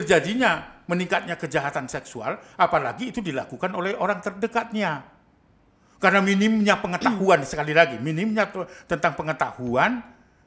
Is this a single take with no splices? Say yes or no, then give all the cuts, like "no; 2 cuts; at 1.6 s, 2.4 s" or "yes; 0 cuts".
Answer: yes; 0 cuts